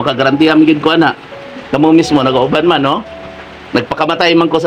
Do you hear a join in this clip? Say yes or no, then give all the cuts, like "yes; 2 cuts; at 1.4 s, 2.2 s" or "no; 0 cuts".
no; 0 cuts